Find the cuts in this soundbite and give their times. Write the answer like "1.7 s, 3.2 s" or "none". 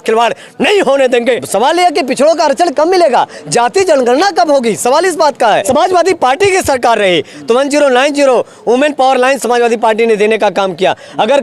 1.5 s, 5.6 s